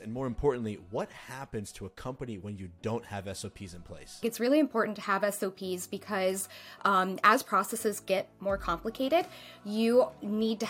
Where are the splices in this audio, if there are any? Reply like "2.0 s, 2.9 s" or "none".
4.2 s